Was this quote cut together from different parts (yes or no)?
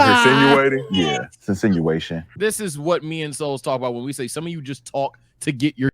yes